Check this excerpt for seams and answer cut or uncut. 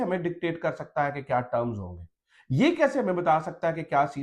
uncut